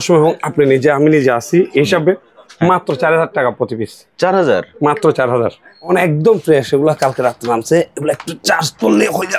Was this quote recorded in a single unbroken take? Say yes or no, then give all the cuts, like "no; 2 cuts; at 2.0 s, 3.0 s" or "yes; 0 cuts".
no; 1 cut; at 5.9 s